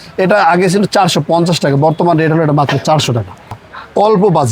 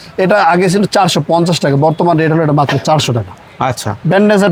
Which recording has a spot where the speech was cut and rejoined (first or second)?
first